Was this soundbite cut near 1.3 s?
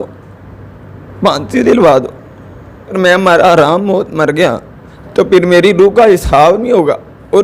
no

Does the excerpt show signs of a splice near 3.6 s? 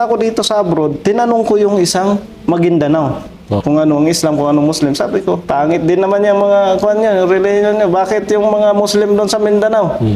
yes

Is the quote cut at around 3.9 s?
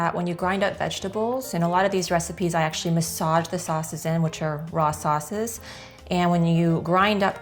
no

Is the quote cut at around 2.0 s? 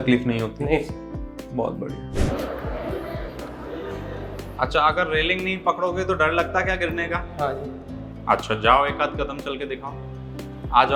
yes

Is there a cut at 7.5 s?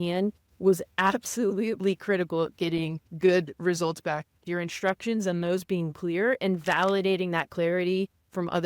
no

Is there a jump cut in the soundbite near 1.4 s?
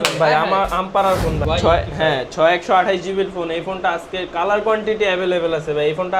yes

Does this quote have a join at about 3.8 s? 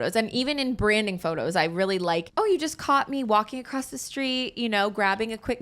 no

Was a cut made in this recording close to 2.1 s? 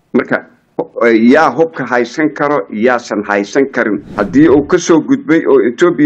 no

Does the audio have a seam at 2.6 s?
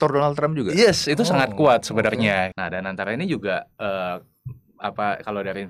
yes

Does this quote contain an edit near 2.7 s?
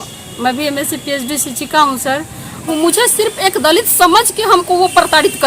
yes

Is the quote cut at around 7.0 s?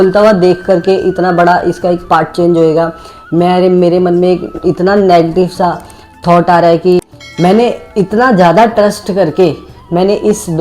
yes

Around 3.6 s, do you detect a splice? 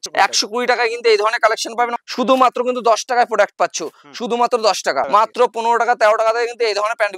no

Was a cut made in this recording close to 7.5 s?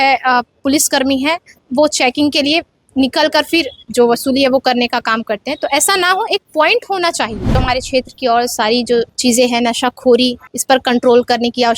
yes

